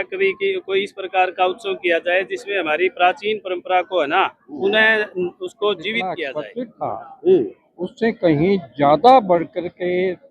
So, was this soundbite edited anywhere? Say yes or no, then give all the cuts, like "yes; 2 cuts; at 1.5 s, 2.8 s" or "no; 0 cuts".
yes; 1 cut; at 6.2 s